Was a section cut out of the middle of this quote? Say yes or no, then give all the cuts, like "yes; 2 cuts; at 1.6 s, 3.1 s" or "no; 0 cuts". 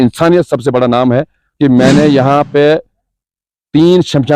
yes; 1 cut; at 1.4 s